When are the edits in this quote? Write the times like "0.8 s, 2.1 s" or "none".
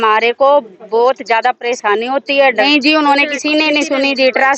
2.7 s